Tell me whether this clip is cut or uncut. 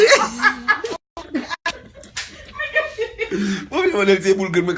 uncut